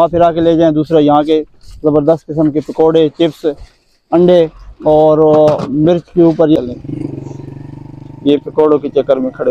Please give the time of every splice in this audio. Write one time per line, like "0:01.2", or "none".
0:06.6